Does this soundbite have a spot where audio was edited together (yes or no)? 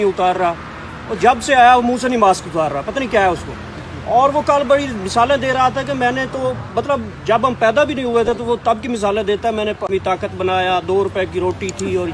no